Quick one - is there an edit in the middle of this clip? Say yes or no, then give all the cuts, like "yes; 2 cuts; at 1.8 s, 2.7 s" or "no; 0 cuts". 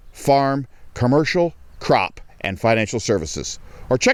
no; 0 cuts